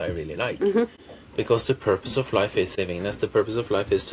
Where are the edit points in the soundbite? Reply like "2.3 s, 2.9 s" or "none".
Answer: 1.0 s, 2.7 s